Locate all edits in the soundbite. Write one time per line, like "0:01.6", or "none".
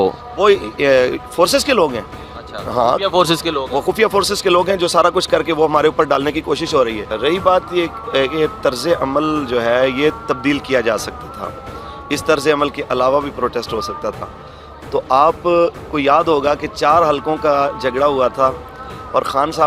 none